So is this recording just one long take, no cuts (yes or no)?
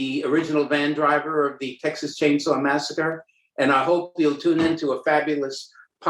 yes